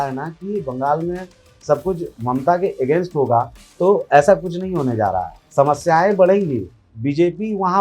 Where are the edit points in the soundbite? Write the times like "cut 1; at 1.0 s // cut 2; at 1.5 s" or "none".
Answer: cut 1; at 2.1 s // cut 2; at 5.4 s